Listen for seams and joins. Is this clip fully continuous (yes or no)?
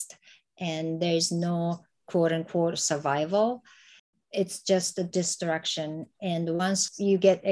yes